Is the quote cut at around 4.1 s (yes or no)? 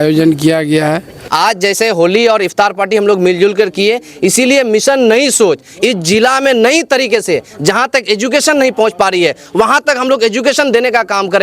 no